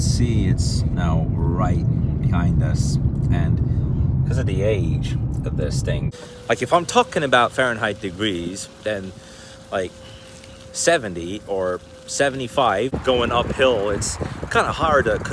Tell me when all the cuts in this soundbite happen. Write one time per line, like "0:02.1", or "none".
0:06.1
0:13.0